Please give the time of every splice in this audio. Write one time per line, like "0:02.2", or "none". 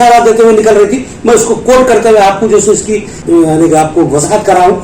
0:03.2